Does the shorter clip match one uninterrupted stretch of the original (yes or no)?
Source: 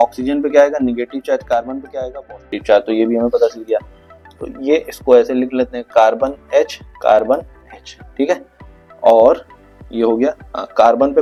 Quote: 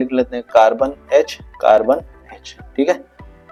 yes